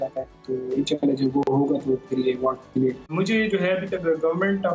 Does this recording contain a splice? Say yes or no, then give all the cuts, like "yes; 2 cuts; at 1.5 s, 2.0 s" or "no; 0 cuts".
yes; 1 cut; at 3.0 s